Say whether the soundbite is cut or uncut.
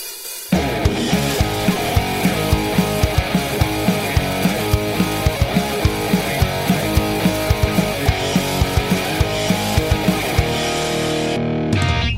uncut